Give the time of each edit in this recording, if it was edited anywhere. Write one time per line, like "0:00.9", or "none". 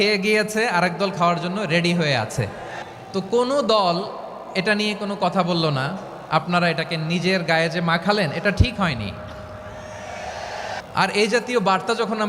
0:02.8
0:10.8